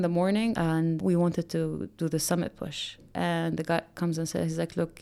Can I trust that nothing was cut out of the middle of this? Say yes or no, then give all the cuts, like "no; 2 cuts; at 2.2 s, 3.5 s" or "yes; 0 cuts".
yes; 0 cuts